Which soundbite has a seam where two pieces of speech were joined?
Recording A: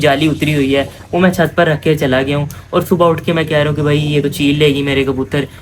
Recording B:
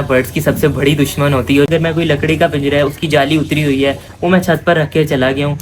B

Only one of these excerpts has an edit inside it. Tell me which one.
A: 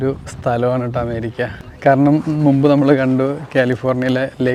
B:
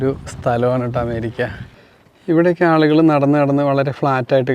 B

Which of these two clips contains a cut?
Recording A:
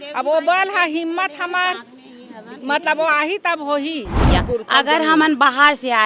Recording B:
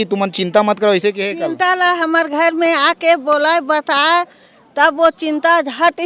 A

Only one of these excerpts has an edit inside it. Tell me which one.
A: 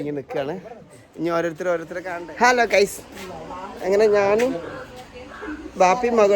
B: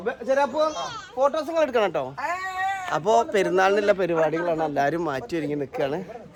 A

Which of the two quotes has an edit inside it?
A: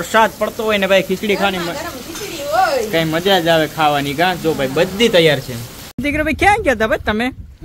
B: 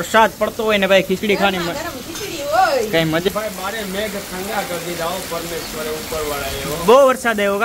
B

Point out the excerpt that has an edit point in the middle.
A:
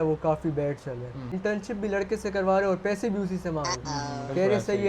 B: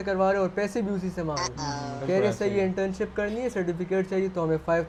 A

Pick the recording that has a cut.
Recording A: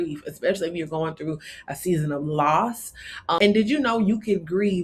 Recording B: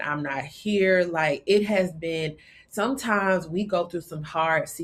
A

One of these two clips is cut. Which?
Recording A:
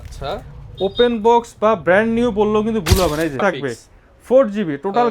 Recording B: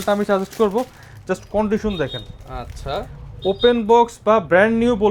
A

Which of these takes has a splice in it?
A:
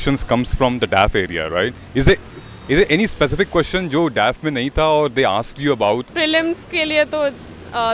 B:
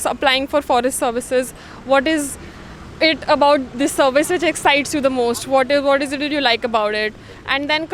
A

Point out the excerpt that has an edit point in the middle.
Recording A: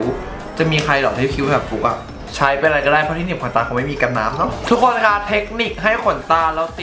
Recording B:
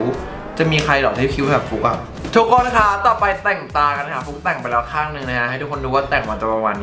A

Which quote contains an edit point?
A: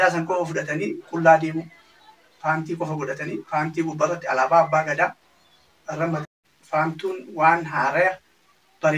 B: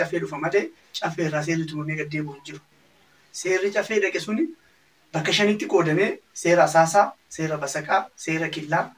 A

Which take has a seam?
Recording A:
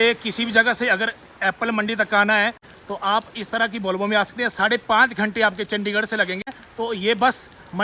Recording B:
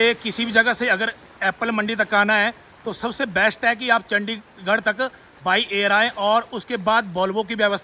A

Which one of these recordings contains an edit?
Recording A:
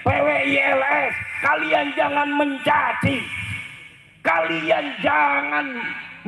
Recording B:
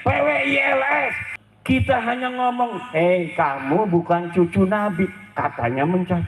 B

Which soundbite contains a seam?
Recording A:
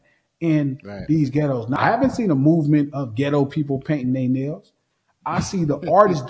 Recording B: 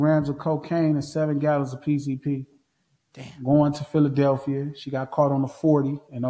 A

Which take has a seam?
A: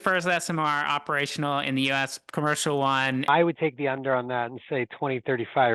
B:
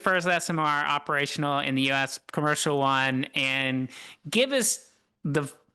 A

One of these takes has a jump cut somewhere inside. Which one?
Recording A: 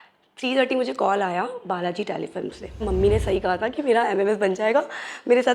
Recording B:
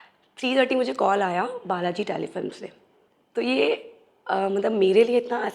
A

